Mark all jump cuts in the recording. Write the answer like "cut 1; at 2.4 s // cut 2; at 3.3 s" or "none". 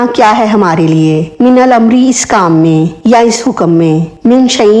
none